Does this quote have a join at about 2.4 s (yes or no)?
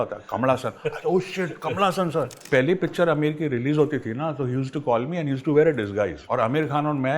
yes